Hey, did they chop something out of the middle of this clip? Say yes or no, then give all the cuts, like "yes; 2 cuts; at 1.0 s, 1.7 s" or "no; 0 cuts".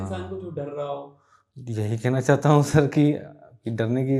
no; 0 cuts